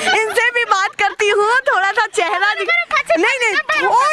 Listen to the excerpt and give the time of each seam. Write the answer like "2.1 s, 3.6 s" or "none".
none